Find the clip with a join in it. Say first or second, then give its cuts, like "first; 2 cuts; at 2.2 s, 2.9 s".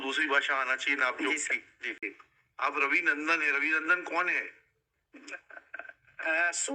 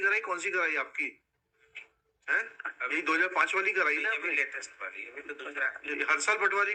first; 1 cut; at 2.1 s